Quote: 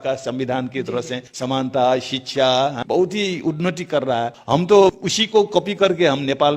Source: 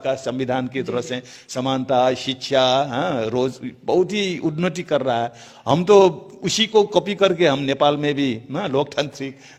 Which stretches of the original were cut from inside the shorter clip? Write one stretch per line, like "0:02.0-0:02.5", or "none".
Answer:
0:01.2-0:01.4
0:02.9-0:03.8
0:05.4-0:05.6
0:06.3-0:06.5